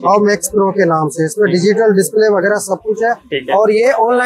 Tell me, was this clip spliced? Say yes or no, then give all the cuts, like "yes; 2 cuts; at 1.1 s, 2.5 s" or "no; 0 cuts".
no; 0 cuts